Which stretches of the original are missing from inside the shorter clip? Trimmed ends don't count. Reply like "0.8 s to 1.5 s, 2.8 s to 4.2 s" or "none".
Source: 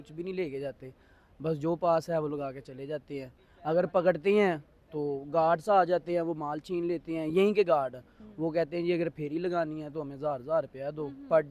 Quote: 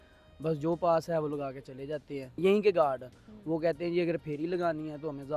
3.4 s to 7.3 s